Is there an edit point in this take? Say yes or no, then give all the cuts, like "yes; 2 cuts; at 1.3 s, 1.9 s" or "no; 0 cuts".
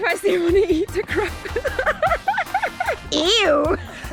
no; 0 cuts